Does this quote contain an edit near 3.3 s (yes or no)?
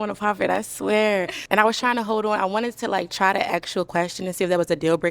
no